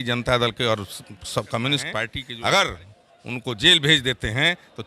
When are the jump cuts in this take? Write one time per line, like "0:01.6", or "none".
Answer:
0:02.2